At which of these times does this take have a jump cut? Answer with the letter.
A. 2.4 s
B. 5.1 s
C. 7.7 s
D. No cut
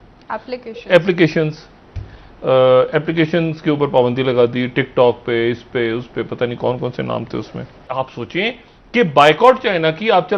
C